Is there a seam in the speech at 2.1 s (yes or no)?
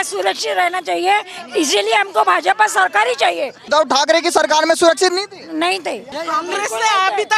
no